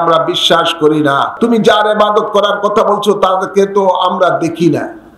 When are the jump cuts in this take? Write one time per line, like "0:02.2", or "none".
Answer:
0:01.3